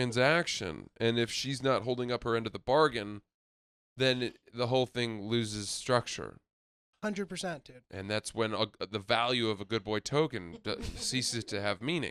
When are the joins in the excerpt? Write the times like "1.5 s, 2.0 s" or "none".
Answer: none

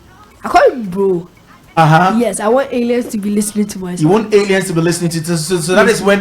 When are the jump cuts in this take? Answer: 1.6 s

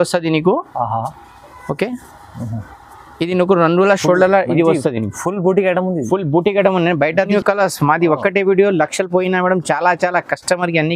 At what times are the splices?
7.3 s

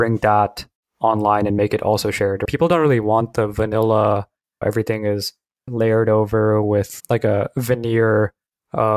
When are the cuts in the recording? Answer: 4.6 s

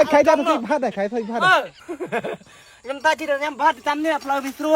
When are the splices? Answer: 1.8 s

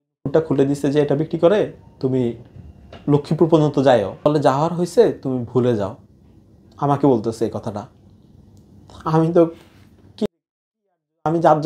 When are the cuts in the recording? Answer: 4.1 s

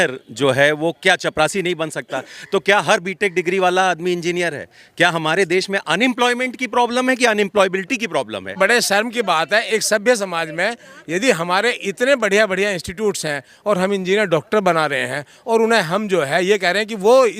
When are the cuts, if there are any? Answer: 8.6 s

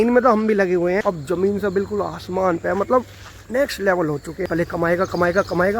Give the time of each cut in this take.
1.1 s, 4.5 s

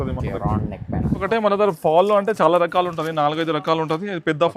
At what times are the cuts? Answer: 1.2 s

